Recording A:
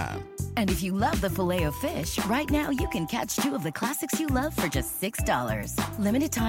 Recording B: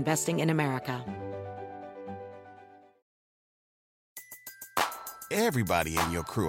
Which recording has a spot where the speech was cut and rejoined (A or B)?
B